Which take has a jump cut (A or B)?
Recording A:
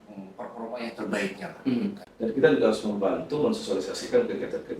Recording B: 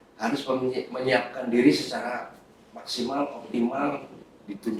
A